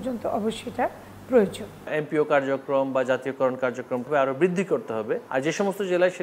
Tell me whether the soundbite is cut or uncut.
cut